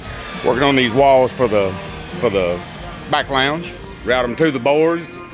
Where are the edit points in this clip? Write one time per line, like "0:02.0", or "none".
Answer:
0:03.8